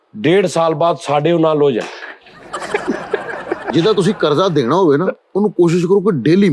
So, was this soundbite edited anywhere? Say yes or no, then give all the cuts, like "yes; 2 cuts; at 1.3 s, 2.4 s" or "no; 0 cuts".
yes; 1 cut; at 3.6 s